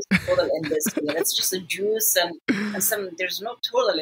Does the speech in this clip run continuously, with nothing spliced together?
yes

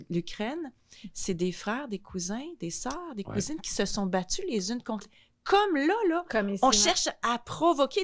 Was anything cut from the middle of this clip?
no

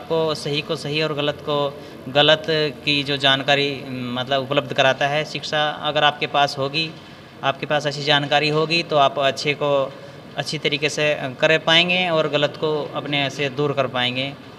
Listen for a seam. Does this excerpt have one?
no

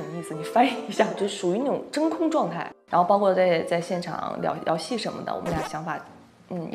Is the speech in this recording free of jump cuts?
yes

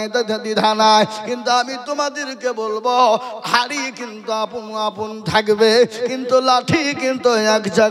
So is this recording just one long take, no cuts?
yes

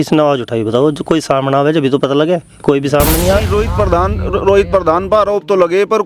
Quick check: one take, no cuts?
no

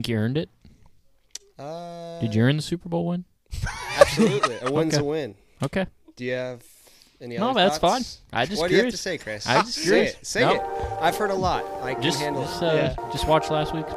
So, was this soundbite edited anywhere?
no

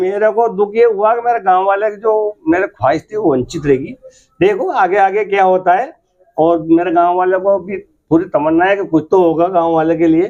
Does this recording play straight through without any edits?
yes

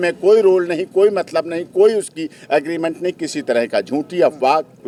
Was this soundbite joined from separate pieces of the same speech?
no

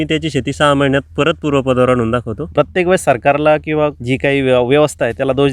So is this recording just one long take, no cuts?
no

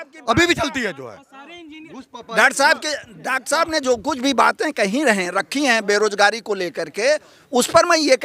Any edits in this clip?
no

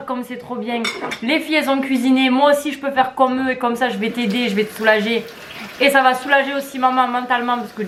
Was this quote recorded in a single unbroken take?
yes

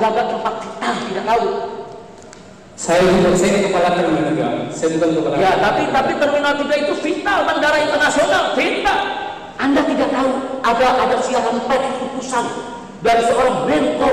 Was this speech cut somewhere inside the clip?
no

